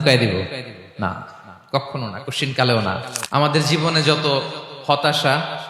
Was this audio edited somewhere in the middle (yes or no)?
yes